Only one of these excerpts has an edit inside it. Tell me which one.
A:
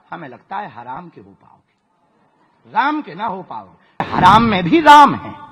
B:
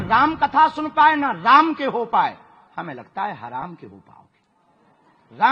A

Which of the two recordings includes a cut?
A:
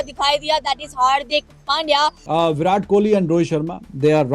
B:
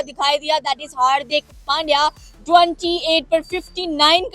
A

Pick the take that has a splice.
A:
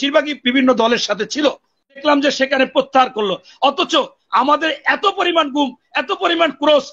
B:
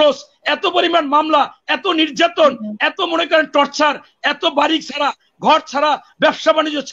A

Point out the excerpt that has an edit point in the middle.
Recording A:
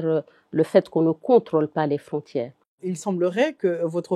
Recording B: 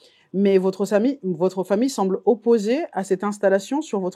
A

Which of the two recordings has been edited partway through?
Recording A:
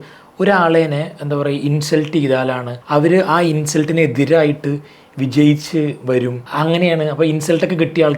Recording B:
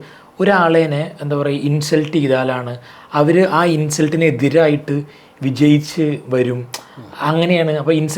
A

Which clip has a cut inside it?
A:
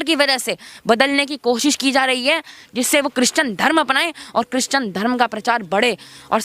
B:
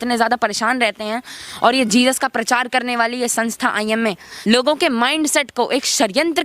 B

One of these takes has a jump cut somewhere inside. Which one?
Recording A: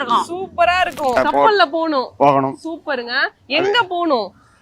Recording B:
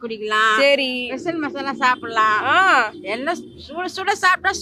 A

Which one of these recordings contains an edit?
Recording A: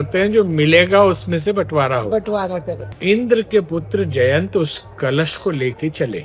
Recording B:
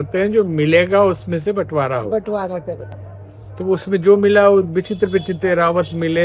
A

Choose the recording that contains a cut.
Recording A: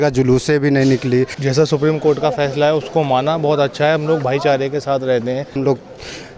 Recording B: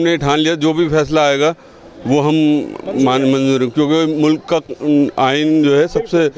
A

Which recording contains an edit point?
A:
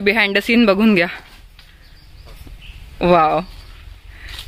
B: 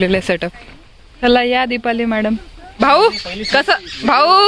B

